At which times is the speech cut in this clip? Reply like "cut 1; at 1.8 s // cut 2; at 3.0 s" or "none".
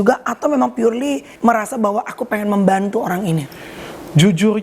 cut 1; at 1.3 s

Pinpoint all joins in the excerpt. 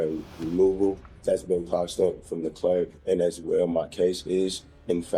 cut 1; at 1.1 s // cut 2; at 3.0 s

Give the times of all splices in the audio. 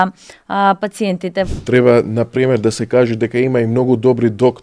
cut 1; at 1.5 s

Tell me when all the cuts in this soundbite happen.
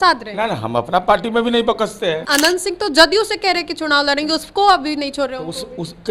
cut 1; at 2.2 s

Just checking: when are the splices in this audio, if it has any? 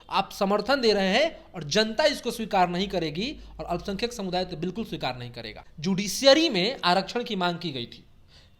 cut 1; at 5.5 s

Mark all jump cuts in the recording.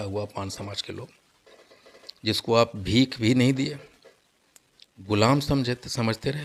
none

